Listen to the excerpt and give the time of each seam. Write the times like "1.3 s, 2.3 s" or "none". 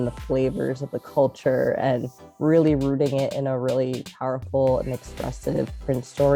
none